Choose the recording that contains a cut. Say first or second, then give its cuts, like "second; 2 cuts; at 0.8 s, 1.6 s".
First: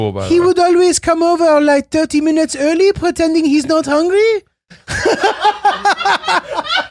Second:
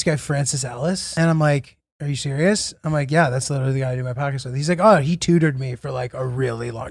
second; 1 cut; at 1.1 s